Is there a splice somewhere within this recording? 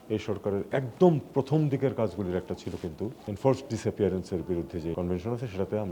yes; 2 cuts; at 3.3 s, 4.9 s

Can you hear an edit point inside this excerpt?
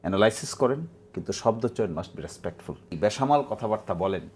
yes; 1 cut; at 2.9 s

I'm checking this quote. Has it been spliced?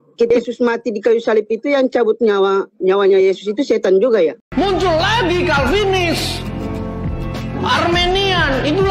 yes; 1 cut; at 4.4 s

